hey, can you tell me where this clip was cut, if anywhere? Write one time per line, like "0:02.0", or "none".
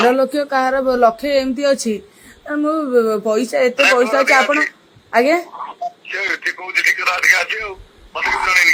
none